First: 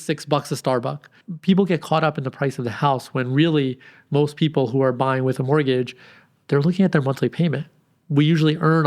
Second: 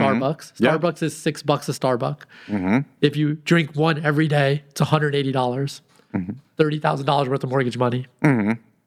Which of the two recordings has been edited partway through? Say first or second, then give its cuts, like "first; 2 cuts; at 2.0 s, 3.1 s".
first; 1 cut; at 1.1 s